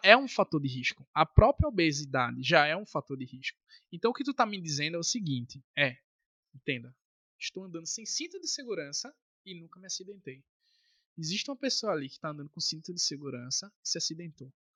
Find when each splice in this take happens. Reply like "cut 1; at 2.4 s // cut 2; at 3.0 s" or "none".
none